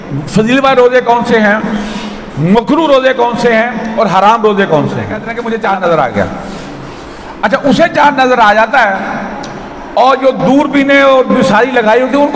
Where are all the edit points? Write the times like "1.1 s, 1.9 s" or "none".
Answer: 5.5 s